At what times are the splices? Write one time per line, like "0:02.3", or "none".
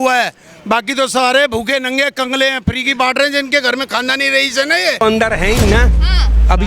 0:05.0